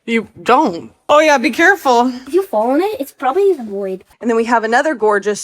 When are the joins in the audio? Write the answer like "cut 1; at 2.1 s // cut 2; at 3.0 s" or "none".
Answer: cut 1; at 1.1 s // cut 2; at 2.2 s // cut 3; at 4.0 s